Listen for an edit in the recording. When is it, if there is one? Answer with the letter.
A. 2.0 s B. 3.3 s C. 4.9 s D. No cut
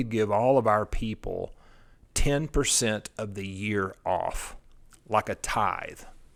D